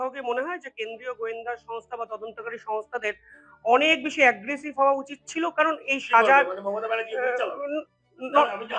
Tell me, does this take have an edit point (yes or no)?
no